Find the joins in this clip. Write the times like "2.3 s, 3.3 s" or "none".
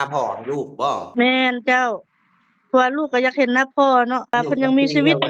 1.2 s, 4.4 s